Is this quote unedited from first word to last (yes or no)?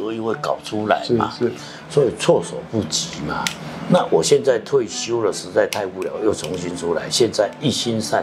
yes